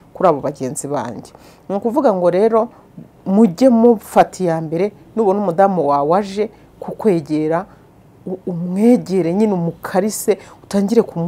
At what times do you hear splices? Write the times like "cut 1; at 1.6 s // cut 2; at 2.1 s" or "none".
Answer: none